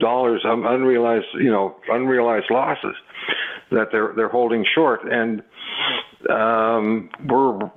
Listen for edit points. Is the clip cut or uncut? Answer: uncut